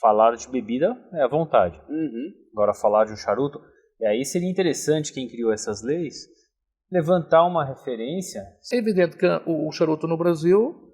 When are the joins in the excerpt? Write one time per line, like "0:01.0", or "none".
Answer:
0:08.6